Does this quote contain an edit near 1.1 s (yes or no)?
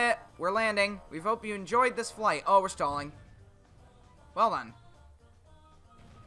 yes